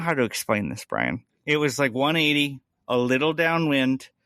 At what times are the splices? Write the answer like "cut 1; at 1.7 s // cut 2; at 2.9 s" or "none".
cut 1; at 1.3 s